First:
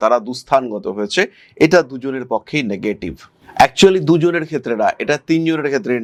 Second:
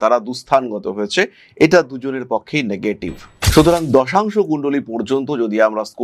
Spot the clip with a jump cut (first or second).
second